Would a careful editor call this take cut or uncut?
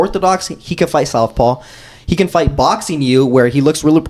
uncut